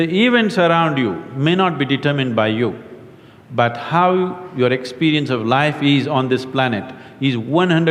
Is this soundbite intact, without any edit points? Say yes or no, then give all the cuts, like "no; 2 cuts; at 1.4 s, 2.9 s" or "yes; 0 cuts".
yes; 0 cuts